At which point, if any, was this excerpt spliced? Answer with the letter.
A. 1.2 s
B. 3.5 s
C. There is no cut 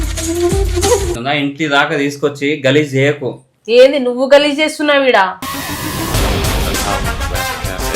A